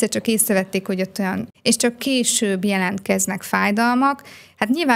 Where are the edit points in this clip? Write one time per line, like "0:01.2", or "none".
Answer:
0:01.4